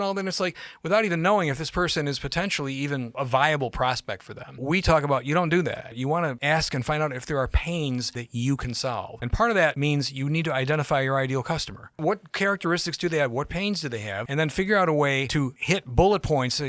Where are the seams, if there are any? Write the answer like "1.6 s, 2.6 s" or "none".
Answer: 3.1 s, 4.6 s, 6.0 s, 8.2 s, 9.2 s, 9.8 s, 12.0 s, 14.2 s, 15.5 s